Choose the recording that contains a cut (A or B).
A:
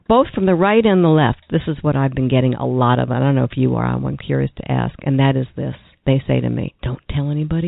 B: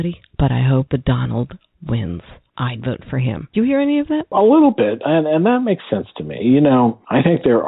B